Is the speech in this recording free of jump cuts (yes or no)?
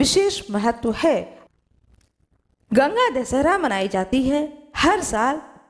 no